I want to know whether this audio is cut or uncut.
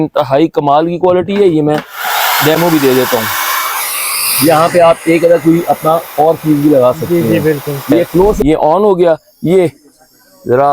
cut